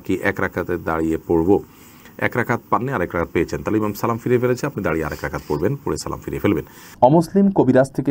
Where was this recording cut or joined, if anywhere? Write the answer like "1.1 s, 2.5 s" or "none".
none